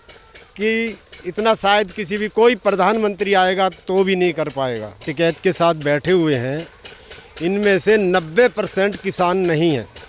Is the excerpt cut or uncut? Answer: cut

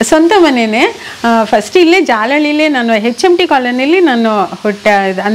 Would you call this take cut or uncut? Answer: uncut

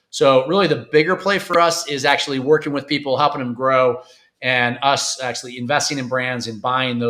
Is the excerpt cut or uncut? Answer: uncut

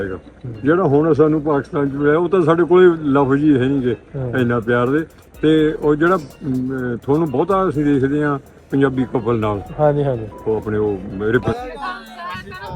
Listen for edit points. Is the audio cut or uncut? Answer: cut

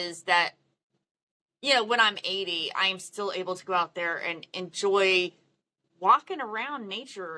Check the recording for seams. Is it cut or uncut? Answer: uncut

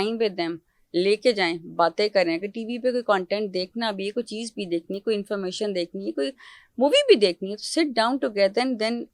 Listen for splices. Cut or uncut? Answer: uncut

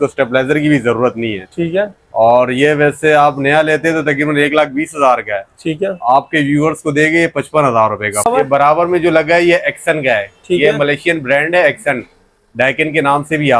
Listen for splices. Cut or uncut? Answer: cut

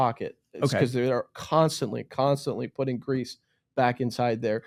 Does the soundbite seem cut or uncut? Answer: uncut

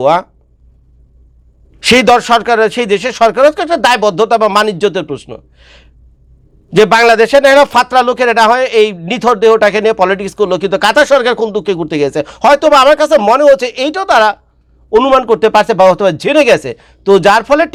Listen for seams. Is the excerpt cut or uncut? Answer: uncut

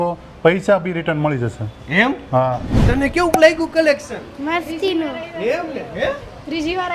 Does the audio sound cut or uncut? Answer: cut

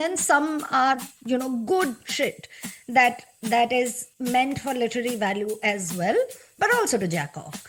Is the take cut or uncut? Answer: uncut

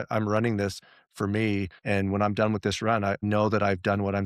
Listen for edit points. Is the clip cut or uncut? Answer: cut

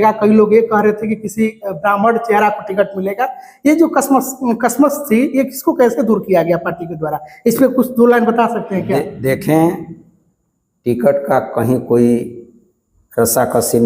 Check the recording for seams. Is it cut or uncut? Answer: uncut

